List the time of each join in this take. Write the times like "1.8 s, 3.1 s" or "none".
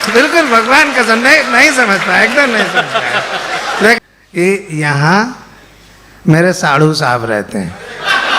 4.0 s